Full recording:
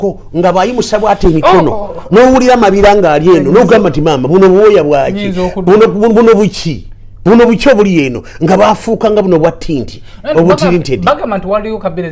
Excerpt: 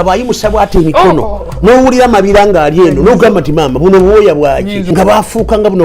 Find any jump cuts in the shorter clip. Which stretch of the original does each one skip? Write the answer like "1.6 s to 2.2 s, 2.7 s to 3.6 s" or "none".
5.3 s to 8.3 s